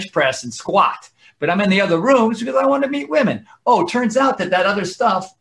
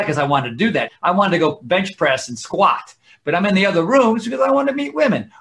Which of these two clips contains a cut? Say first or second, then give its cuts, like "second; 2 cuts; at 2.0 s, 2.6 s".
second; 1 cut; at 0.9 s